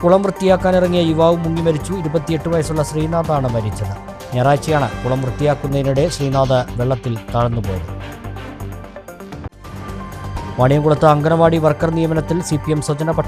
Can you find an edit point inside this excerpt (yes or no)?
no